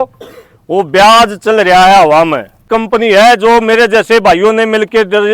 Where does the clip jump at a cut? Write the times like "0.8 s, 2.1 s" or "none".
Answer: 2.7 s